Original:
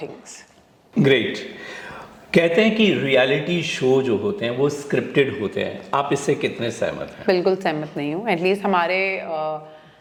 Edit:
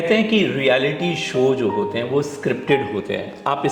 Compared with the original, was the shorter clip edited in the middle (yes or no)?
no